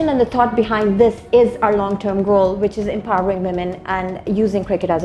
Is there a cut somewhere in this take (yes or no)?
no